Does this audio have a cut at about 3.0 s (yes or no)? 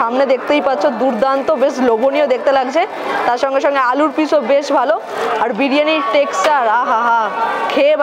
no